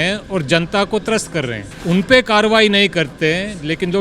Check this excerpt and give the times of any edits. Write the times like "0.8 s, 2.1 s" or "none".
1.7 s